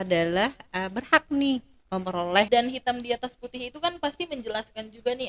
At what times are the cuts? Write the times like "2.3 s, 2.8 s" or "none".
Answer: 2.5 s